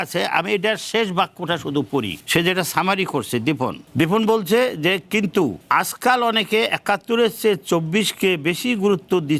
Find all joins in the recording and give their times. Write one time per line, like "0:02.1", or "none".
0:02.2
0:03.8
0:05.6